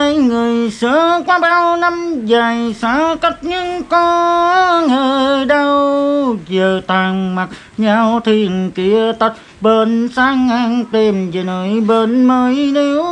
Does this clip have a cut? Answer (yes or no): no